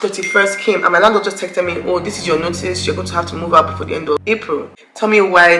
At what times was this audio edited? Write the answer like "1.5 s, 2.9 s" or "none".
4.7 s